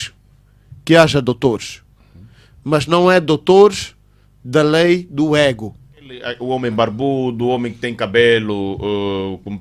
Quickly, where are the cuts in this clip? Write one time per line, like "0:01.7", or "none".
0:06.3